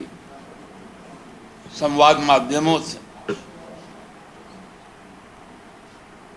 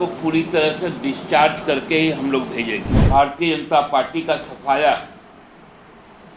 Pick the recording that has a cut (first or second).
second